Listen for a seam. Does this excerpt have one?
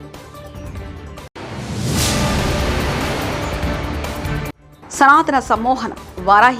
no; 0 cuts

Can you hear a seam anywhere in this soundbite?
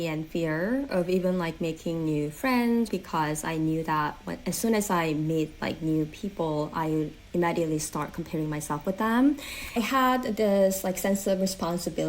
yes; 2 cuts; at 2.9 s, 9.8 s

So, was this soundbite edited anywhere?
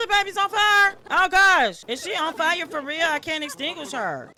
no; 0 cuts

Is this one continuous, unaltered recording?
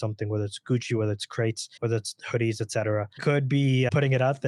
no; 2 cuts; at 1.7 s, 3.2 s

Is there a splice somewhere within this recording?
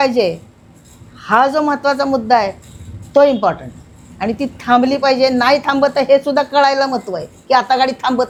no; 0 cuts

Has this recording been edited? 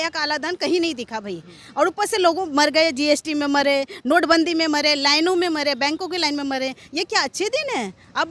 no; 0 cuts

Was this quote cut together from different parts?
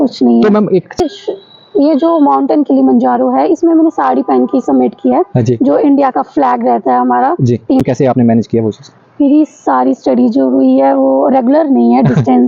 yes; 2 cuts; at 1.0 s, 7.8 s

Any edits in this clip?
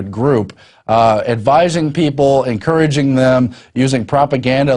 no; 0 cuts

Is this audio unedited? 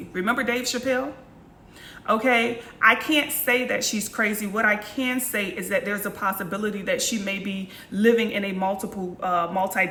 yes; 0 cuts

